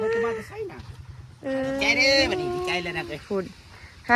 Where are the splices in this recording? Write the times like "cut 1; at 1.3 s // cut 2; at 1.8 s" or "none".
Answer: cut 1; at 2.0 s